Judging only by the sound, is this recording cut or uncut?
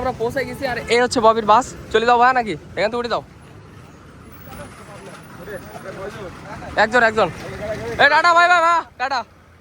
uncut